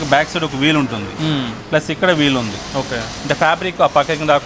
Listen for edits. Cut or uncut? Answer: uncut